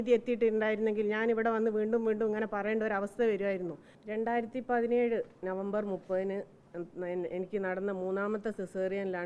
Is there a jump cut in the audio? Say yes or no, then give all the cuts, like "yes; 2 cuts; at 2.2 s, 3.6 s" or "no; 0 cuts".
yes; 1 cut; at 4.0 s